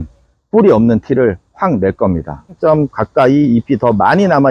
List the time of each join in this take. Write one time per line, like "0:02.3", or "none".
0:02.6